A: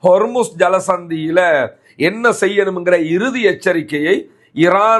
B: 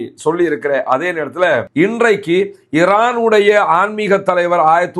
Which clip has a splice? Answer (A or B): B